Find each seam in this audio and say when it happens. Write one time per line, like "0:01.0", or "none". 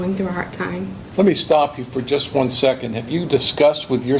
0:01.0